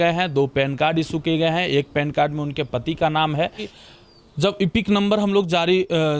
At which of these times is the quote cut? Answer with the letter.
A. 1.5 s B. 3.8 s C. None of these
B